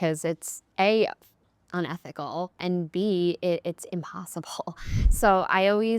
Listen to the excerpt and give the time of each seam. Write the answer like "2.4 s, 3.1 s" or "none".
2.6 s